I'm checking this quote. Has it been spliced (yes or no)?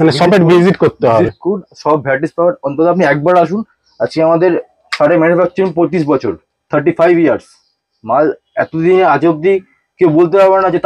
no